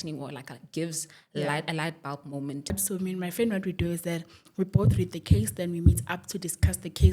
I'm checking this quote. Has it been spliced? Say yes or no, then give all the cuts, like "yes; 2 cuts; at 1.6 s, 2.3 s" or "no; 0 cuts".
yes; 1 cut; at 2.7 s